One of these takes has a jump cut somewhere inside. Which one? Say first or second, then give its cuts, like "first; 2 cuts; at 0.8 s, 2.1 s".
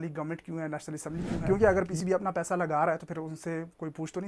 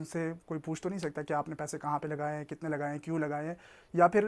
first; 1 cut; at 1.4 s